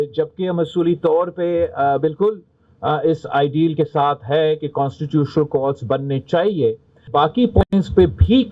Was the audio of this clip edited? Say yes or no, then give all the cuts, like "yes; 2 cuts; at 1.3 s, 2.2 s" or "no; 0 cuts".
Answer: yes; 1 cut; at 7.1 s